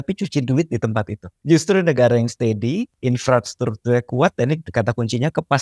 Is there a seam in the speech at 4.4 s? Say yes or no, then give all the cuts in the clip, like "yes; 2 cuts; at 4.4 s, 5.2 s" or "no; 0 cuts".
no; 2 cuts; at 1.3 s, 2.9 s